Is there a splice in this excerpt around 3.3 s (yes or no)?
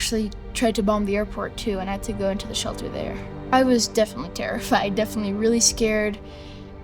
yes